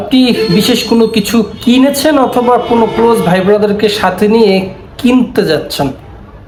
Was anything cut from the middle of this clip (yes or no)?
no